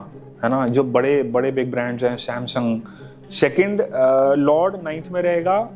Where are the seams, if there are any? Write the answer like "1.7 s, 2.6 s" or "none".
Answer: 3.2 s